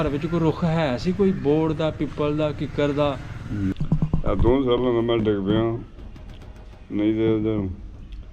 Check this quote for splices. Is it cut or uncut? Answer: cut